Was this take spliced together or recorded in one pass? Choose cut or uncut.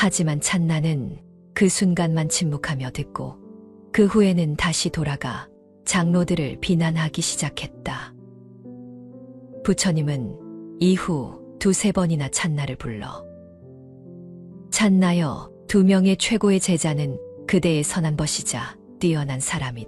uncut